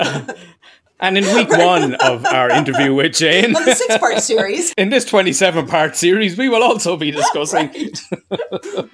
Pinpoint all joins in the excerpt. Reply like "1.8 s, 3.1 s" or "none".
4.7 s